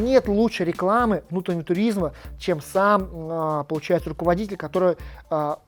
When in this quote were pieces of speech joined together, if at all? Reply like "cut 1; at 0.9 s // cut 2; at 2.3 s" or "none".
none